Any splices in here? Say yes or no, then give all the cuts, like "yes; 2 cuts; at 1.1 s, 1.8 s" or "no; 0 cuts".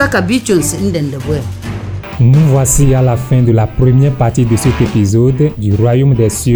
no; 0 cuts